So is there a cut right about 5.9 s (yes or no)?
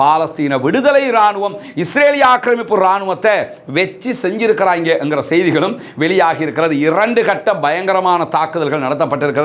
no